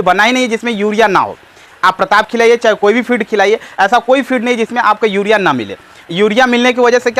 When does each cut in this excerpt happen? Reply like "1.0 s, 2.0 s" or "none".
none